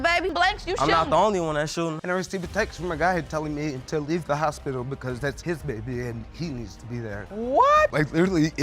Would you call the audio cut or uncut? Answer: cut